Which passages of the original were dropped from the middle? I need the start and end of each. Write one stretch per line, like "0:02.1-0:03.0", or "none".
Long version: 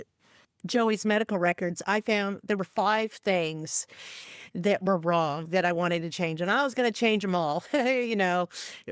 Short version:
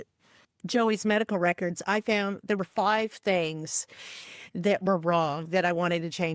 none

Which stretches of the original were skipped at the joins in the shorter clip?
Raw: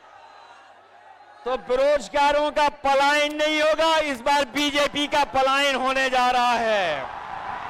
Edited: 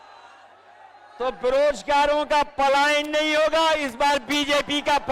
none

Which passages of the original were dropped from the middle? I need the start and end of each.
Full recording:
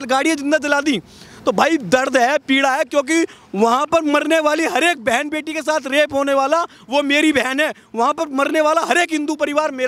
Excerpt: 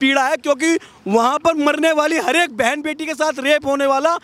none

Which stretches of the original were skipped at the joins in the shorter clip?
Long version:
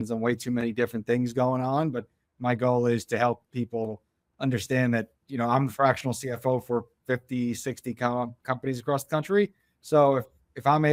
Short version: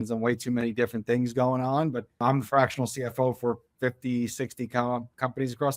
0:02.2-0:05.5

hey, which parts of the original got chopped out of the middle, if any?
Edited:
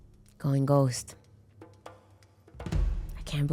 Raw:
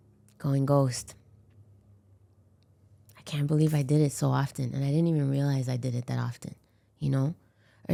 none

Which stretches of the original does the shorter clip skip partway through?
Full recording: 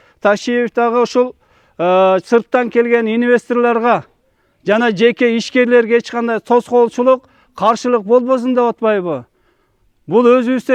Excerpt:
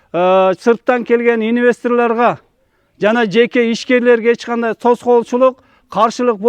none

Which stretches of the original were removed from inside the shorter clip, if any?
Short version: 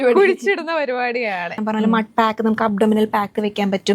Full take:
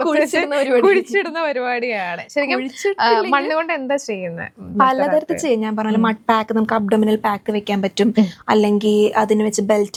0:02.3-0:05.7

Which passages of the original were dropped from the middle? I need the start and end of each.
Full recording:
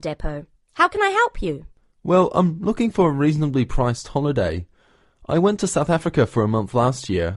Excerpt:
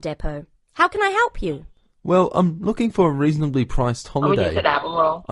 none

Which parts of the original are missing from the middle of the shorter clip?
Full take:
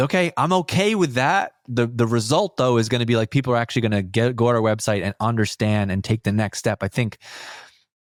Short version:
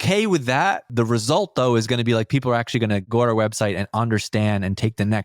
0:01.6-0:01.9
0:04.1-0:04.3

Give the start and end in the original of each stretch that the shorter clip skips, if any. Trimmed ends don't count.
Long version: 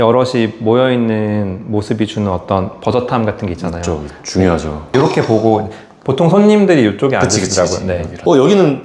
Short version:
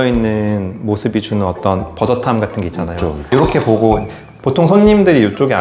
0:04.0-0:04.8

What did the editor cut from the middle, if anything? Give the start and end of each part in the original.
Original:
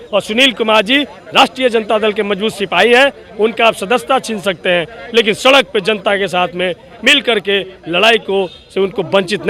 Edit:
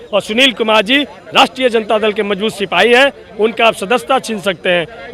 none

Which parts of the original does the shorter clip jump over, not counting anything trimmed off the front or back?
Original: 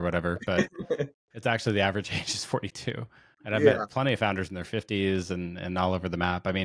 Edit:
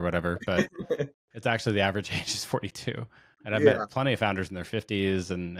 none

